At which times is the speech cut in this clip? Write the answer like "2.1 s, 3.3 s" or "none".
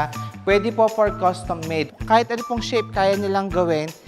1.9 s